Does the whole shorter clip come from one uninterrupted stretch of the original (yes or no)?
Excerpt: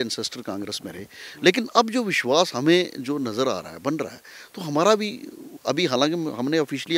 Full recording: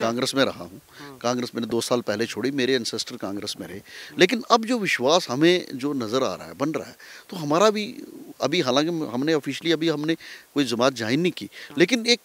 yes